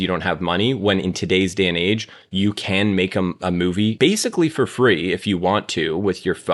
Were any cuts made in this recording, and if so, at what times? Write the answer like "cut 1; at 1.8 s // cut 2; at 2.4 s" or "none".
cut 1; at 3.9 s